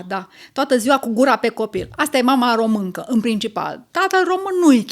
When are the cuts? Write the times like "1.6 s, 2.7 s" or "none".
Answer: none